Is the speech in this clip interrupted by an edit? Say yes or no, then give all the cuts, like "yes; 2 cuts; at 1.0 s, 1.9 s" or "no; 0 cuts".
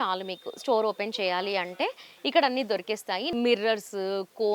yes; 1 cut; at 3.3 s